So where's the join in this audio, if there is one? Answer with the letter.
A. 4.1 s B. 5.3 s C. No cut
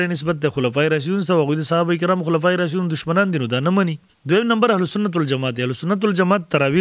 A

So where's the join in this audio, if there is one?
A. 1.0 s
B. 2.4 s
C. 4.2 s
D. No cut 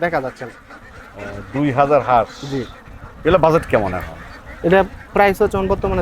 D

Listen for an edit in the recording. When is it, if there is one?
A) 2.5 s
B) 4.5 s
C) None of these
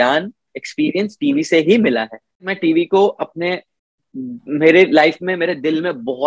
A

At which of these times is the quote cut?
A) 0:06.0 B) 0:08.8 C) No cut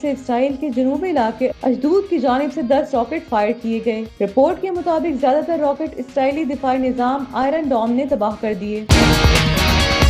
B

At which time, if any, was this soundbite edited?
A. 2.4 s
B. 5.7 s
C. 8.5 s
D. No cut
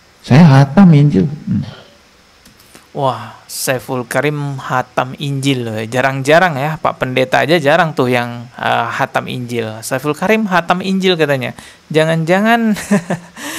D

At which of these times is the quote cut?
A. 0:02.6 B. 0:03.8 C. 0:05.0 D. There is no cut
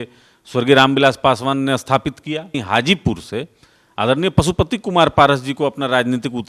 A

